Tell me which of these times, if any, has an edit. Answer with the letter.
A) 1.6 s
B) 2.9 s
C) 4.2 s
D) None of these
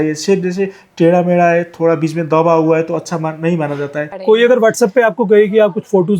C